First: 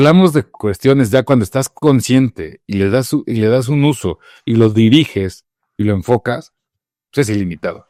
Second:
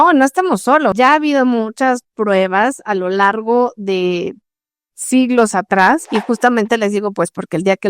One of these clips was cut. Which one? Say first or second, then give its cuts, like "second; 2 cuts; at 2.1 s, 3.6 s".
second; 2 cuts; at 0.9 s, 6.1 s